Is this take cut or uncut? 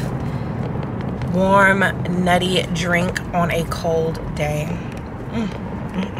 uncut